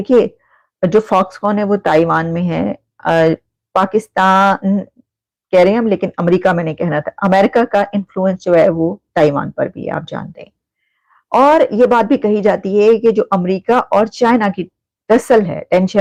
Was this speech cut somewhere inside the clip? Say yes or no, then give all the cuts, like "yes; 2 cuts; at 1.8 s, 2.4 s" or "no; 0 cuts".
no; 0 cuts